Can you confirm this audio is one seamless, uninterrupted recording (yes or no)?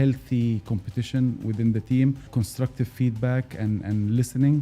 no